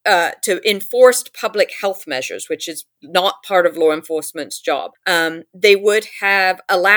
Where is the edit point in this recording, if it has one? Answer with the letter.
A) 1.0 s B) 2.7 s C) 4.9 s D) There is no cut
C